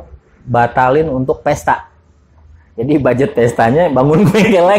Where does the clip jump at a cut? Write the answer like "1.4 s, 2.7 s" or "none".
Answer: none